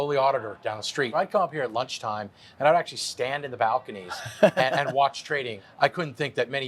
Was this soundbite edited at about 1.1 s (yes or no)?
yes